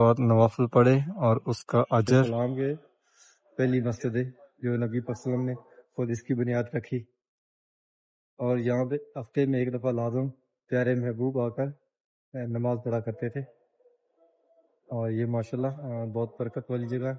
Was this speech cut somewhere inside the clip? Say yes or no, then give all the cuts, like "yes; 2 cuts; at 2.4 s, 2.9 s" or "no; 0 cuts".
yes; 1 cut; at 2.3 s